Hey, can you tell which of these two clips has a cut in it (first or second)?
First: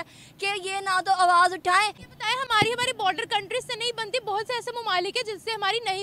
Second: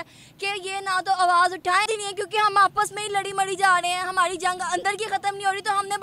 second